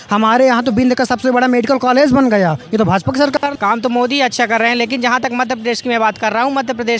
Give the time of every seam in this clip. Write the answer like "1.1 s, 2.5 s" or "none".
3.4 s

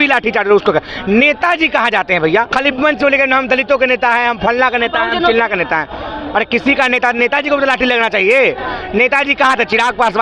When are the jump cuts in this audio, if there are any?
2.5 s

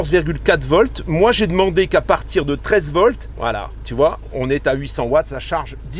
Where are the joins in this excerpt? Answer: none

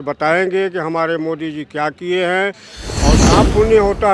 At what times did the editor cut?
3.2 s

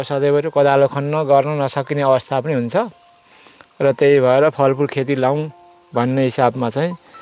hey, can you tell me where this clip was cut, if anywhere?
none

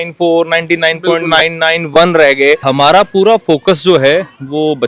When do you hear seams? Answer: 2.6 s

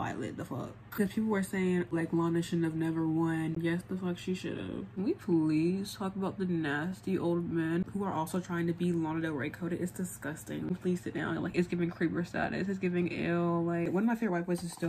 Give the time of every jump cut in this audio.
1.0 s, 1.9 s, 3.5 s, 4.9 s, 10.7 s, 13.9 s

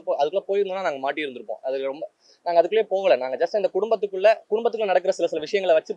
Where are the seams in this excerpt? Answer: none

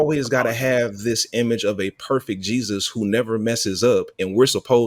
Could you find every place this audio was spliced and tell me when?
none

